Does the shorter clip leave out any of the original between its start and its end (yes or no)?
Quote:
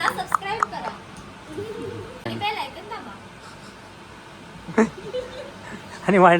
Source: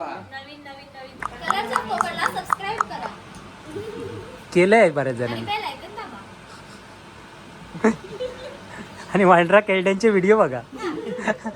yes